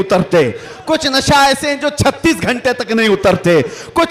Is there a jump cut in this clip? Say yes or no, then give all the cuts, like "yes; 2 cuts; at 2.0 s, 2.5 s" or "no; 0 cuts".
no; 0 cuts